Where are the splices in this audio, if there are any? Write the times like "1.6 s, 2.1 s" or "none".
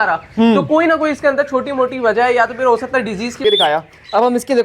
3.4 s